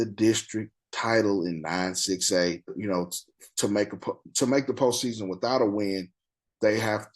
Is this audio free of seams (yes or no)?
no